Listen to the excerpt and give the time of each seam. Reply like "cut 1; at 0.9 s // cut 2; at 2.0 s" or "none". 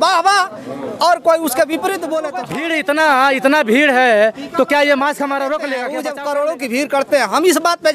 cut 1; at 2.6 s // cut 2; at 6.0 s